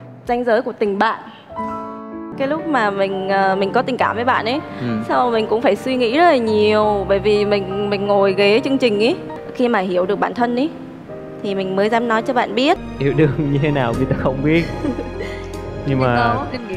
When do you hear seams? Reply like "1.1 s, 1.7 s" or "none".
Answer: 2.3 s, 9.4 s, 12.9 s